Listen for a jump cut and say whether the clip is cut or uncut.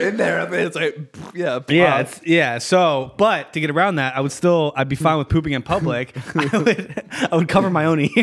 uncut